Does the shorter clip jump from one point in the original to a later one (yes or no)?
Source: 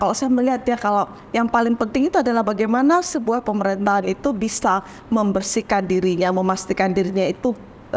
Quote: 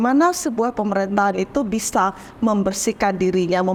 no